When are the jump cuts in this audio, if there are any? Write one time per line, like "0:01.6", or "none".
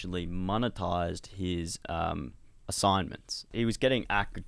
0:03.5